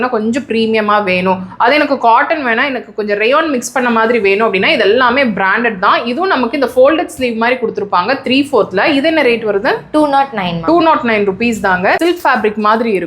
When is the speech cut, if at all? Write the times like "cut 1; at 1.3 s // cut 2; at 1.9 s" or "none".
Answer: cut 1; at 12.0 s